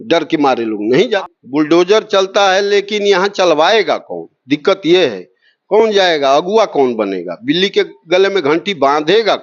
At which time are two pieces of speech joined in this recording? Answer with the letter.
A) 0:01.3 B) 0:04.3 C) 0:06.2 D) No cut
A